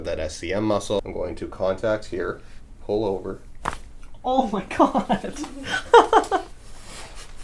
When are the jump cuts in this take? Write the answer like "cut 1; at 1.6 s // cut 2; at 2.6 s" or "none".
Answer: cut 1; at 1.1 s